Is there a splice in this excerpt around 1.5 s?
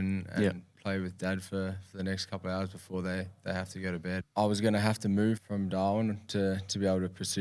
no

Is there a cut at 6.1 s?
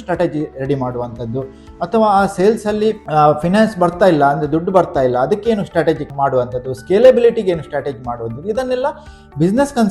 yes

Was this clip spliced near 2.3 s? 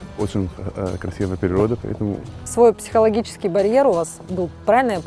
yes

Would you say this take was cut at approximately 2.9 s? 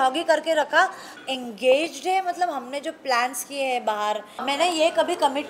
no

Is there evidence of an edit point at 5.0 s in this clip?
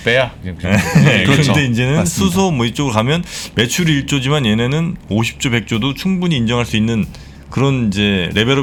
no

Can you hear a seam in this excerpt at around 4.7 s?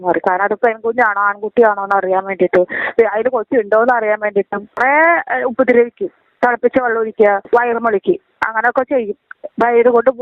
yes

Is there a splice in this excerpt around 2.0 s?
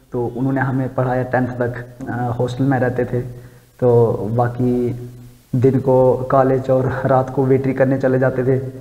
yes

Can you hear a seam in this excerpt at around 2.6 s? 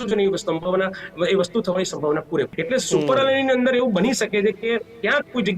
yes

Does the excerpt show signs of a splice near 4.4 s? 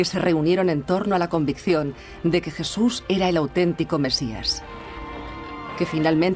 no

